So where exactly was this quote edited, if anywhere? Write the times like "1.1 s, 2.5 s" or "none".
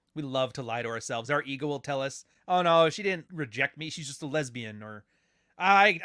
3.3 s